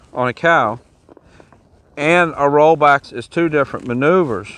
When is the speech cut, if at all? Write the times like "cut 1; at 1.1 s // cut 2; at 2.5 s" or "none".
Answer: cut 1; at 3.1 s